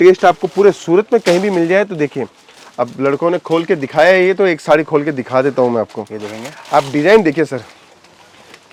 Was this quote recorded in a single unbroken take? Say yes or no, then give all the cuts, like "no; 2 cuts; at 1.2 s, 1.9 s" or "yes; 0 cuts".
yes; 0 cuts